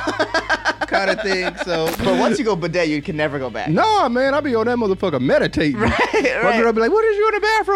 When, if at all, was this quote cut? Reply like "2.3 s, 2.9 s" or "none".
2.0 s